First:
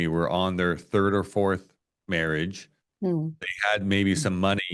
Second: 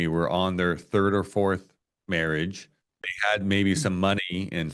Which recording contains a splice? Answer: second; 1 cut; at 2.9 s

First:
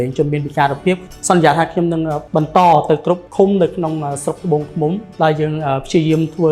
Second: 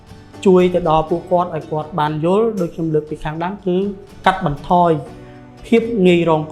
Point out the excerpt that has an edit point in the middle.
first; 4 cuts; at 1.0 s, 2.2 s, 3.3 s, 5.1 s

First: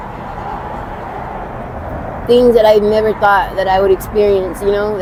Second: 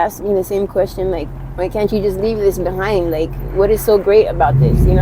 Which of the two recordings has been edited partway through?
second; 1 cut; at 1.3 s

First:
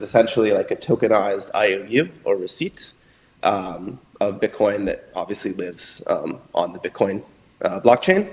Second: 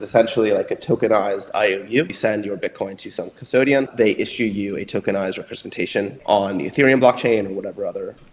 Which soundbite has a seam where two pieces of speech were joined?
second; 3 cuts; at 2.1 s, 3.9 s, 6.2 s

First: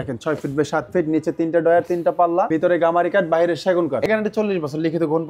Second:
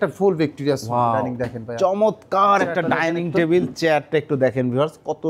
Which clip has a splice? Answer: first; 2 cuts; at 2.5 s, 4.0 s

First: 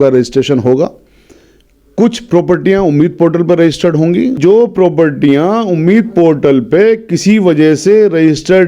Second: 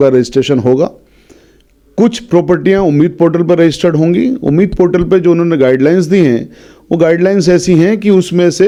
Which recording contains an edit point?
first; 1 cut; at 4.4 s

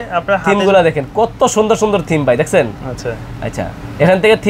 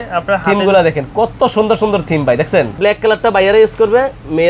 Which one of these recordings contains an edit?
second; 1 cut; at 2.8 s

